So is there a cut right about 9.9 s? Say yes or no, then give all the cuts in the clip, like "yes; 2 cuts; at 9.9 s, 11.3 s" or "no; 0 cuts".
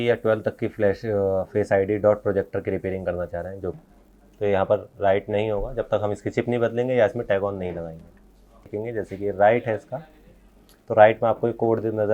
no; 2 cuts; at 3.7 s, 8.7 s